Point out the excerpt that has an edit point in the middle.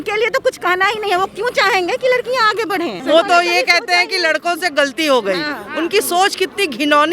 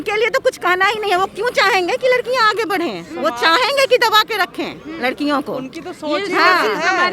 first; 1 cut; at 3.0 s

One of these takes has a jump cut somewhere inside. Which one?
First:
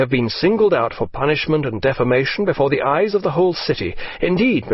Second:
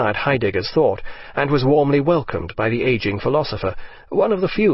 first; 1 cut; at 1.9 s

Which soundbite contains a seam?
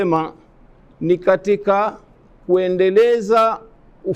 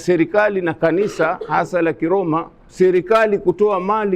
second; 1 cut; at 2.6 s

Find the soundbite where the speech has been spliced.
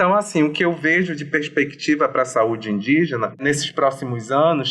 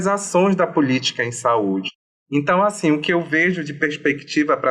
first; 1 cut; at 3.4 s

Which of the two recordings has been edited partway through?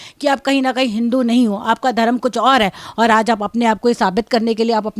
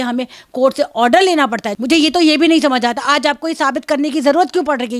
second; 1 cut; at 1.7 s

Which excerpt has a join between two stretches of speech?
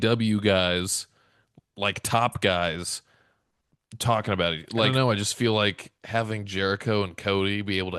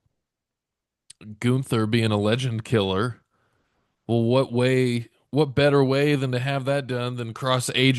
first; 1 cut; at 4.9 s

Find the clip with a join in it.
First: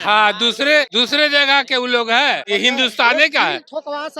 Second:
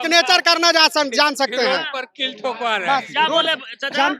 first; 2 cuts; at 0.9 s, 2.4 s

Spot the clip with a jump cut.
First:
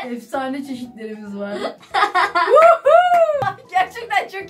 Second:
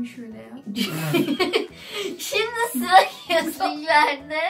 first; 1 cut; at 3.4 s

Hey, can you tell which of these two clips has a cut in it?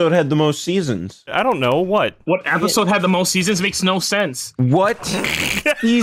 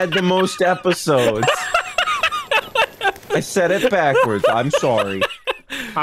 first; 1 cut; at 1.3 s

